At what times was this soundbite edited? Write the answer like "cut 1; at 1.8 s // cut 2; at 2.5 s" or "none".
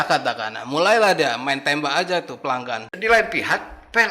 cut 1; at 2.9 s

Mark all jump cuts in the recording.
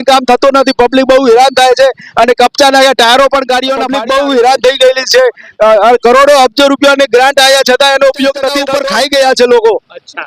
cut 1; at 3.9 s // cut 2; at 8.7 s

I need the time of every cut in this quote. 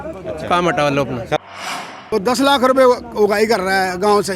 cut 1; at 1.6 s

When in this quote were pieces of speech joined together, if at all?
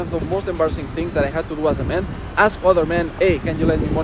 none

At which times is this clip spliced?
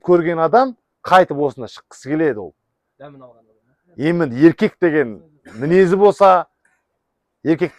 none

